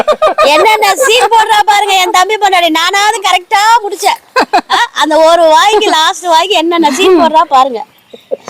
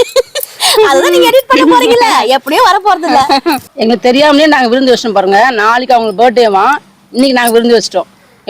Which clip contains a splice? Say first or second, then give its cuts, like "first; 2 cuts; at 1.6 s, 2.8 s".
second; 1 cut; at 3.7 s